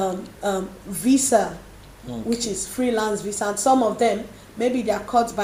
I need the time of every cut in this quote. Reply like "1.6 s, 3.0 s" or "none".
none